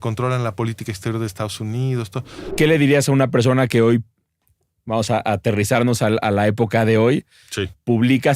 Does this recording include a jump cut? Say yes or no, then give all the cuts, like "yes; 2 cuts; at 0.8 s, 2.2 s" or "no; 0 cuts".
yes; 1 cut; at 2.4 s